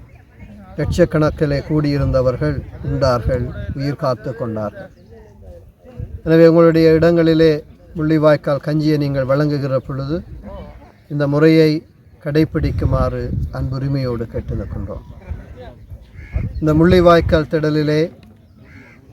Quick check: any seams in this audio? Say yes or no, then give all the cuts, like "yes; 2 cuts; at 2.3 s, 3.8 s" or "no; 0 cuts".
no; 0 cuts